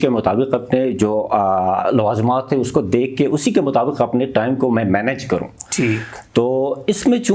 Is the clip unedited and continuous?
yes; 0 cuts

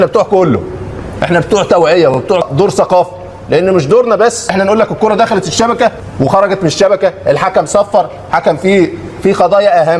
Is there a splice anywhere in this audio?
yes; 3 cuts; at 2.4 s, 4.5 s, 6.0 s

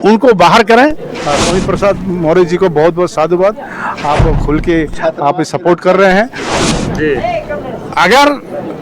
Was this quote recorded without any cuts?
no; 2 cuts; at 1.2 s, 6.5 s

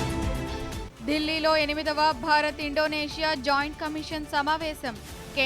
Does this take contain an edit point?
yes; 1 cut; at 0.9 s

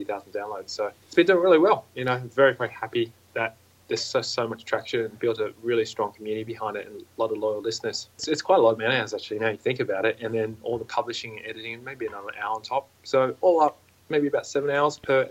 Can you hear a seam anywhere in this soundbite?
yes; 2 cuts; at 1.0 s, 8.2 s

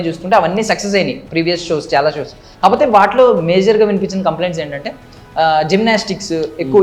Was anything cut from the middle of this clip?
no; 0 cuts

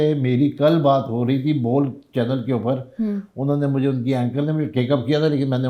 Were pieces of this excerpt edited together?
no; 0 cuts

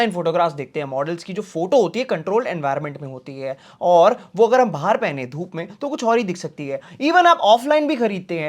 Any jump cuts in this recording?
no; 0 cuts

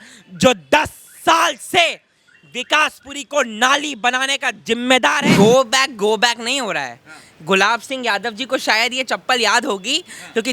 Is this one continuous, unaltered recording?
no; 1 cut; at 5.3 s

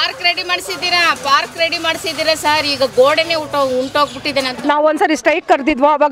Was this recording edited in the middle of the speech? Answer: yes; 1 cut; at 4.5 s

